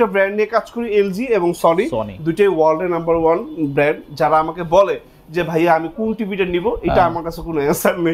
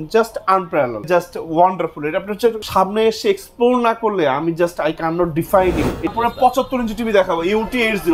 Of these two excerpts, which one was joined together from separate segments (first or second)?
second